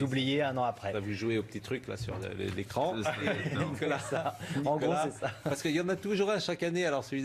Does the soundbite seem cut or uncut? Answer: uncut